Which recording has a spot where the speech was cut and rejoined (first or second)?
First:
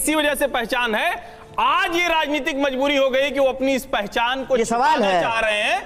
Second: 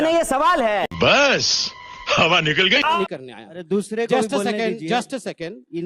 second